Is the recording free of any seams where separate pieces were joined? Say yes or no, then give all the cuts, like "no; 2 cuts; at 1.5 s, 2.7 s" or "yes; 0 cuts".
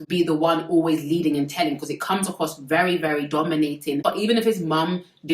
no; 1 cut; at 4.0 s